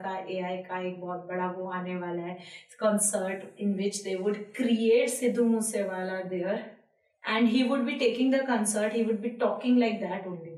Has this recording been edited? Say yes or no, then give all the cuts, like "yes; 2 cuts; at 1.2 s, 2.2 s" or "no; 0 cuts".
no; 0 cuts